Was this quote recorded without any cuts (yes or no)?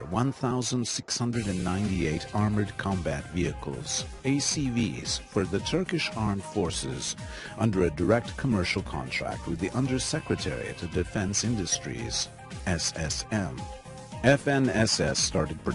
no